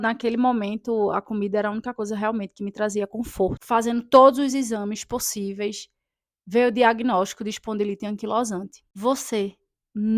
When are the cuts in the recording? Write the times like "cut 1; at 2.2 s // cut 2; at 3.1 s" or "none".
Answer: cut 1; at 3.6 s // cut 2; at 8.9 s